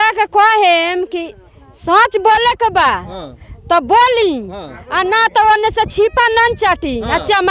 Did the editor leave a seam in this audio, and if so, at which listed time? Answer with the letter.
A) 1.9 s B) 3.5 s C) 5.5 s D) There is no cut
D